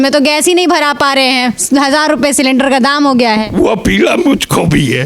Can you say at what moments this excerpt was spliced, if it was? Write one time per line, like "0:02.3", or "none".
none